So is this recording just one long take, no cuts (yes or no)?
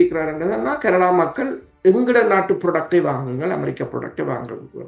yes